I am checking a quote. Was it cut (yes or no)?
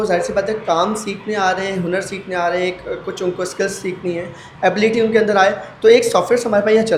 no